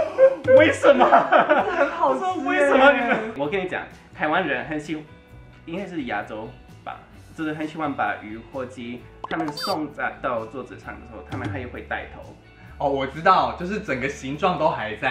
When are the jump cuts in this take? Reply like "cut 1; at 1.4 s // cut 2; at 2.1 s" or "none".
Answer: none